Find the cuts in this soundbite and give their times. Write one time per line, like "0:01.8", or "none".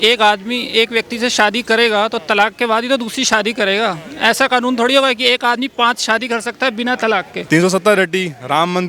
0:07.4